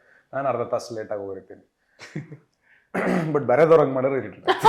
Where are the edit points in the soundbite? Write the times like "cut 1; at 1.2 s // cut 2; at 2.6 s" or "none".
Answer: none